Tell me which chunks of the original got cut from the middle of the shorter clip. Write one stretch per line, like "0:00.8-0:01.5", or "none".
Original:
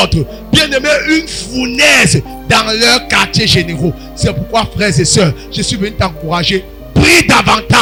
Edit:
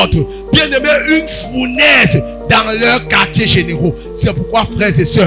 none